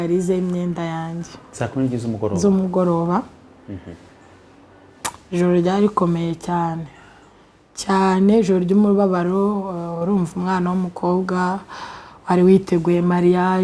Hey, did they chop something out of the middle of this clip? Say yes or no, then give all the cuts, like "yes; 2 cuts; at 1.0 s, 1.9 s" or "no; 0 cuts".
no; 0 cuts